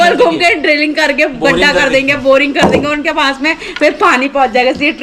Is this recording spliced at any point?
no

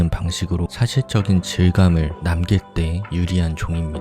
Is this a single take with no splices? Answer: no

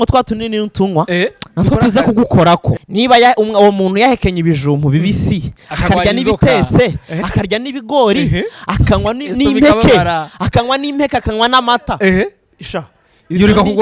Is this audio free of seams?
no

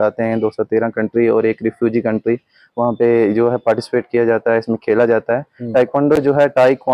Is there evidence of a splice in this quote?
no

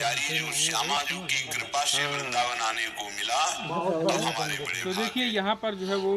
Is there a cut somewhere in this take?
no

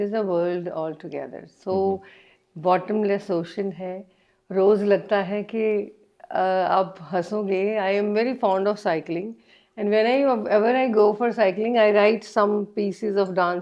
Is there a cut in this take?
no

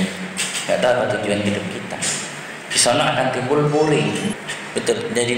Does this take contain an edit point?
yes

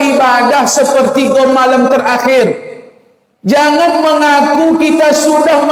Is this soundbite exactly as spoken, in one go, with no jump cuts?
yes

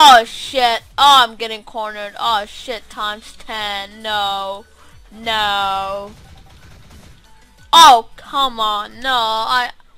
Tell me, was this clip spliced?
yes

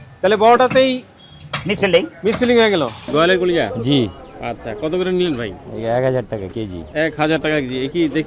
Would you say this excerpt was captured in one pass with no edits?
no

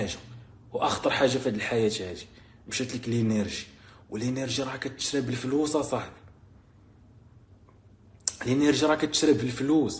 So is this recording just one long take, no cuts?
yes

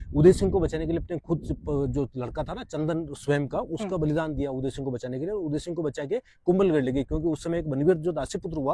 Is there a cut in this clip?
no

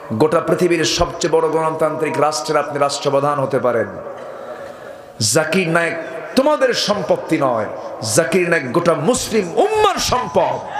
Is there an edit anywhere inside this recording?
no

